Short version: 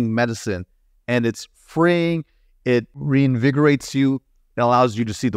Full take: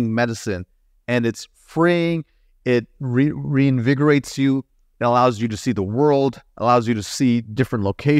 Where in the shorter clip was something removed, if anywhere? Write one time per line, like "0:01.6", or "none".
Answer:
0:03.0